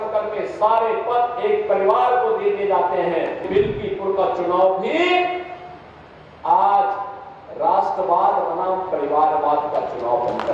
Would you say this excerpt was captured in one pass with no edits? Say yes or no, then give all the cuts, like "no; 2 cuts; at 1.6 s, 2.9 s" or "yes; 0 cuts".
no; 1 cut; at 3.5 s